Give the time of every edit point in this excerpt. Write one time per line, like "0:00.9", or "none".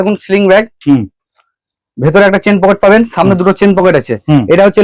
none